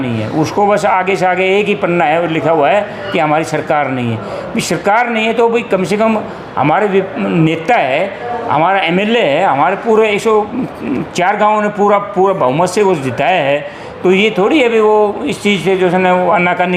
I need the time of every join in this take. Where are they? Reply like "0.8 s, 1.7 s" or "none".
none